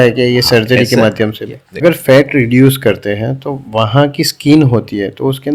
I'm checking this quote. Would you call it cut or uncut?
cut